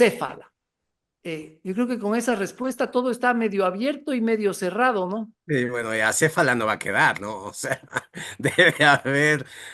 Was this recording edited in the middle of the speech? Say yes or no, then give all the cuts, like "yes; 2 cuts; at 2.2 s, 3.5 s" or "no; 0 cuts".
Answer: no; 0 cuts